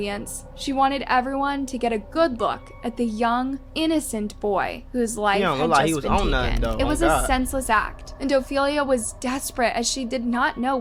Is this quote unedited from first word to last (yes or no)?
yes